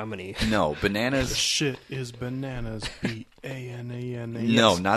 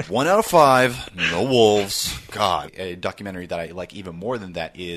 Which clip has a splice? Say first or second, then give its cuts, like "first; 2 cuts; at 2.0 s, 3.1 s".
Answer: second; 1 cut; at 2.7 s